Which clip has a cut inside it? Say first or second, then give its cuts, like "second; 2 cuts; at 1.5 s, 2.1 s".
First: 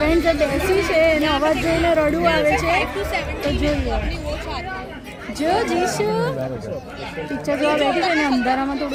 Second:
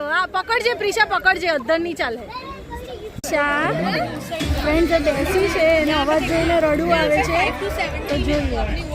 second; 1 cut; at 3.1 s